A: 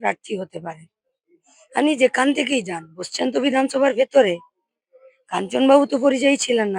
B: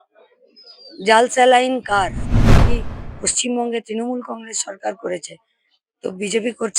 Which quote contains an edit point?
B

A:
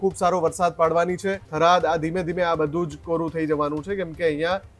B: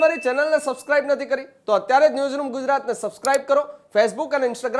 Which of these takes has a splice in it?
A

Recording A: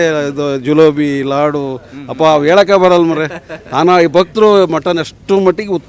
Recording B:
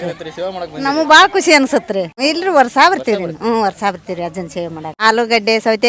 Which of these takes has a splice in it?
B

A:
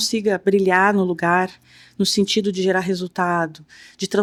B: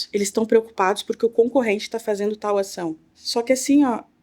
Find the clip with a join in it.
B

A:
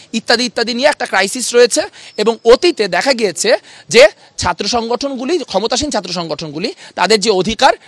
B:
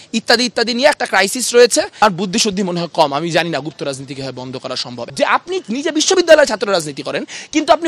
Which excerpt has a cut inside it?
B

